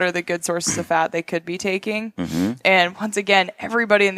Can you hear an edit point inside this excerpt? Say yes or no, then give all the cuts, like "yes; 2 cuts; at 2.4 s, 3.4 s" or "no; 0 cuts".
no; 0 cuts